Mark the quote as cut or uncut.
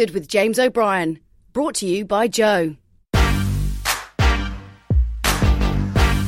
cut